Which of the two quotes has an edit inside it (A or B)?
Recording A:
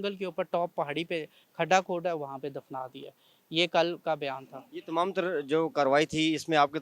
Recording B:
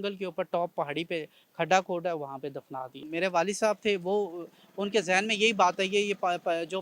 B